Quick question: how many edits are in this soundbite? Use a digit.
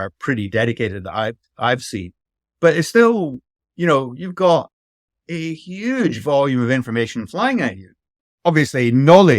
1